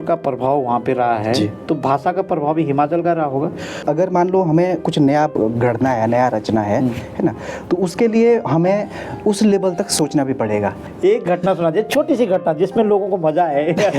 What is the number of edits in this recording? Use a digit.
2